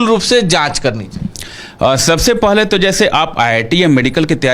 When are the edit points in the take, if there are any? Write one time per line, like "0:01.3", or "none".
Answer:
none